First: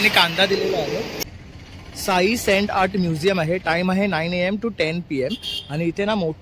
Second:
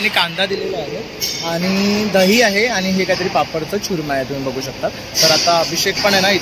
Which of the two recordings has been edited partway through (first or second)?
first